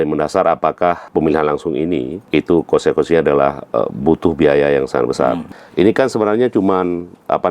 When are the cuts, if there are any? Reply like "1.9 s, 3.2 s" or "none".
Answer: 1.1 s, 2.2 s, 5.5 s